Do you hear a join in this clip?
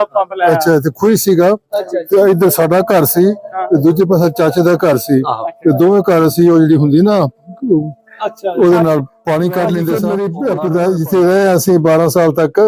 yes; 1 cut; at 10.1 s

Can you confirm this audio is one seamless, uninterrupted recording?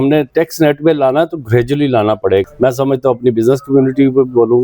no; 1 cut; at 2.5 s

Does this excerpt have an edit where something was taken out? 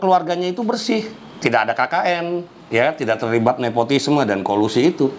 no; 0 cuts

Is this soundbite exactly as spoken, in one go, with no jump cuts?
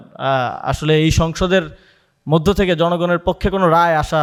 yes; 0 cuts

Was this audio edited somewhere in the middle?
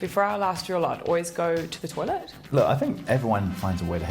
yes; 1 cut; at 2.4 s

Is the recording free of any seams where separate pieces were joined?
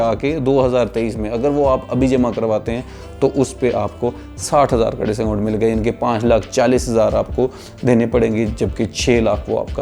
yes; 0 cuts

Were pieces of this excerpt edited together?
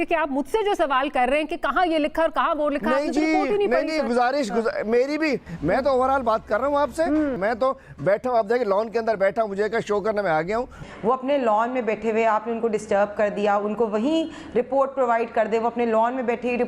yes; 3 cuts; at 5.5 s, 7.4 s, 10.8 s

